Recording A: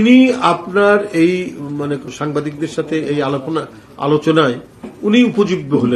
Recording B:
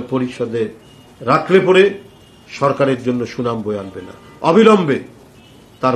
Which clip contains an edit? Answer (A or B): A